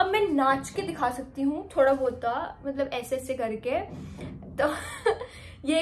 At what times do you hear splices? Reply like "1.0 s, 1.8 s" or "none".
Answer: none